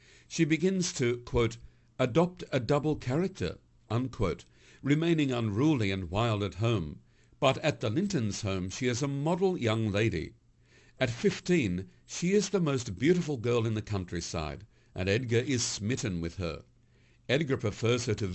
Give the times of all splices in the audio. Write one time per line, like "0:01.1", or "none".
none